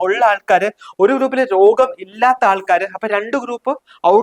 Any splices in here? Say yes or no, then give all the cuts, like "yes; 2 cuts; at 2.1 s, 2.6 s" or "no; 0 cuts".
no; 0 cuts